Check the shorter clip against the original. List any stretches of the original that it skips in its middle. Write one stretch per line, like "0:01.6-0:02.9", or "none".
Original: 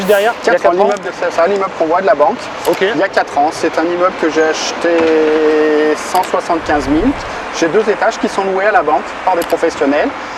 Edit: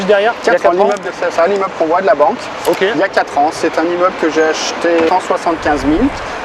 0:05.1-0:06.1

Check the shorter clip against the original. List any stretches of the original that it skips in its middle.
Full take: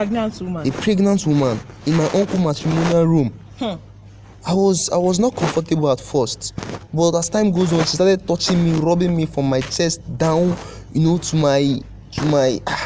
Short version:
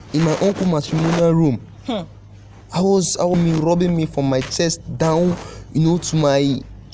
0:05.1-0:08.5

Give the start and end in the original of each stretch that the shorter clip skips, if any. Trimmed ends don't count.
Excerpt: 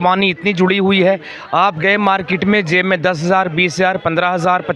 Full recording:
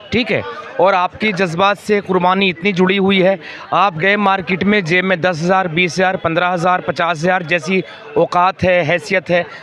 none

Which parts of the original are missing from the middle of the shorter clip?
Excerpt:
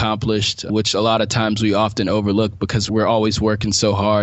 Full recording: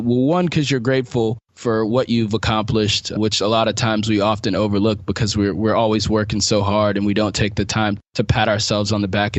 0:05.3-0:05.5

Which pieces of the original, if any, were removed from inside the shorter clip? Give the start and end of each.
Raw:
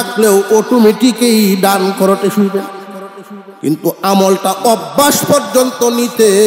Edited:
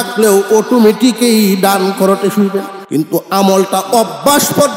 0:02.8-0:03.5

